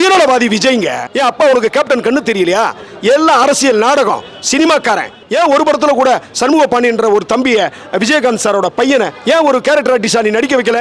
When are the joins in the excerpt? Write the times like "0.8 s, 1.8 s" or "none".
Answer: 1.0 s, 5.2 s